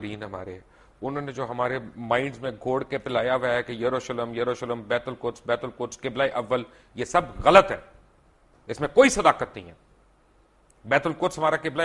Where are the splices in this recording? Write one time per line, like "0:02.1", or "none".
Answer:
none